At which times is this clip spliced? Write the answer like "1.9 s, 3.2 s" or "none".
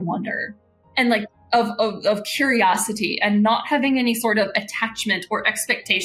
none